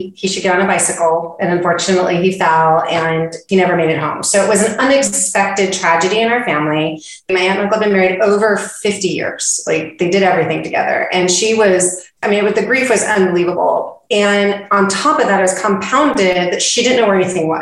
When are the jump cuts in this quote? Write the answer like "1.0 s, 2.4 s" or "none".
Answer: 7.3 s, 12.2 s